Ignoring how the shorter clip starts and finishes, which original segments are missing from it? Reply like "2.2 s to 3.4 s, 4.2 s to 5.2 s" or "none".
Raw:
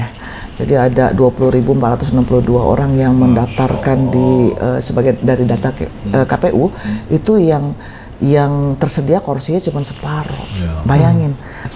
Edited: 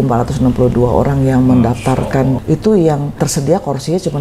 4.1 s to 7.0 s, 7.8 s to 8.8 s